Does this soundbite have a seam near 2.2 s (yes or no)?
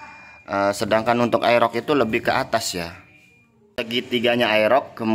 no